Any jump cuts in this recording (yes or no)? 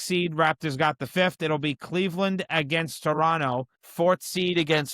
yes